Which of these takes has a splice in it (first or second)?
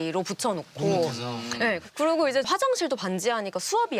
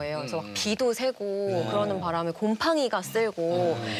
first